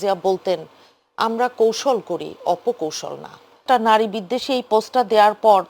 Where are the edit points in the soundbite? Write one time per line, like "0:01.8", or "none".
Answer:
0:03.6